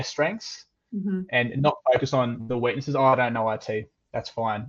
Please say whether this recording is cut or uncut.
uncut